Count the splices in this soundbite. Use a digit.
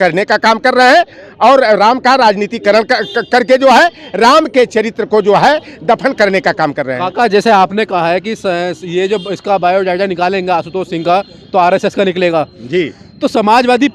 0